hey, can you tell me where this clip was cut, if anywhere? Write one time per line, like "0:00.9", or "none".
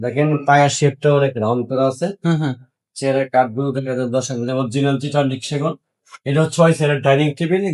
none